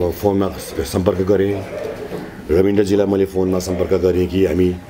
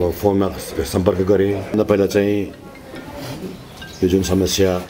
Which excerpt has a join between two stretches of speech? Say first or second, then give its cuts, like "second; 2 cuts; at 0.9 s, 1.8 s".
second; 1 cut; at 1.6 s